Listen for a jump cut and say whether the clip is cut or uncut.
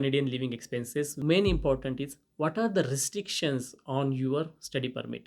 cut